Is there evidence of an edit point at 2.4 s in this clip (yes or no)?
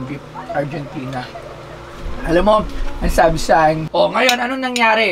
no